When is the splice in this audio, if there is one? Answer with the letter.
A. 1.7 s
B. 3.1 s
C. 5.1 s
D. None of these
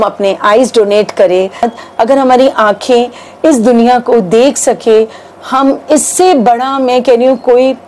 A